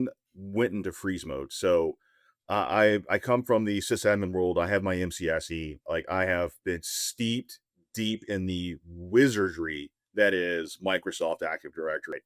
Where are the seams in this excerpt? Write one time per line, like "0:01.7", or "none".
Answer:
none